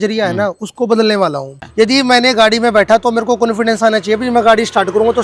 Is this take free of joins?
no; 1 cut; at 1.6 s

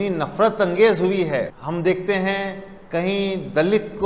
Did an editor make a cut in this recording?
yes; 1 cut; at 1.6 s

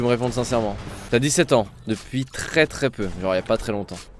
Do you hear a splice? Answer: yes; 1 cut; at 0.9 s

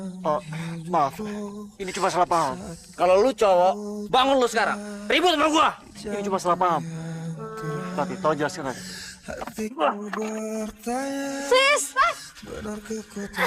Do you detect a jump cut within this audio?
yes; 1 cut; at 7.8 s

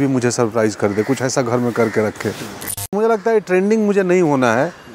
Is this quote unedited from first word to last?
no; 1 cut; at 2.9 s

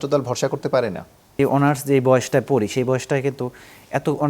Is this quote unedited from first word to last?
no; 1 cut; at 1.3 s

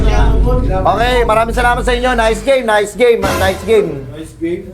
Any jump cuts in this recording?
no; 0 cuts

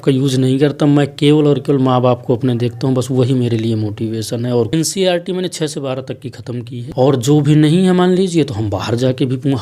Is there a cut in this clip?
yes; 2 cuts; at 4.7 s, 6.8 s

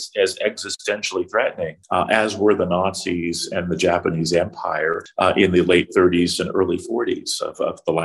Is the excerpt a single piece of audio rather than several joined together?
no; 2 cuts; at 1.8 s, 5.0 s

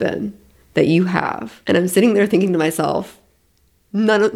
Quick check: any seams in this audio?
yes; 1 cut; at 1.5 s

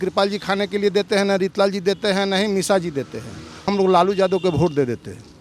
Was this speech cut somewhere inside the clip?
yes; 1 cut; at 3.7 s

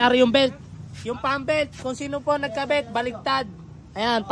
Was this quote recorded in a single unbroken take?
yes; 0 cuts

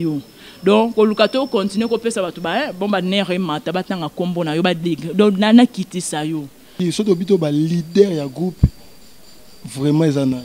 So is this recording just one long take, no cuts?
no; 1 cut; at 6.6 s

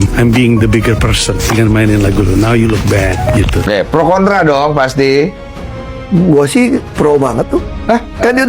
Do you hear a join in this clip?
yes; 1 cut; at 3.7 s

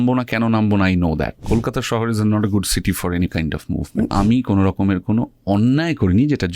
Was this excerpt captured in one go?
no; 2 cuts; at 1.4 s, 4.1 s

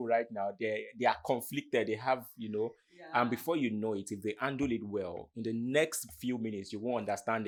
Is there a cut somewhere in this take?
no; 0 cuts

